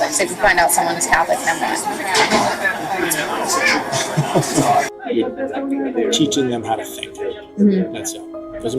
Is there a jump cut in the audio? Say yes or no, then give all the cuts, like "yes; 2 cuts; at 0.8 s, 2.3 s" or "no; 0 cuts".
yes; 1 cut; at 4.9 s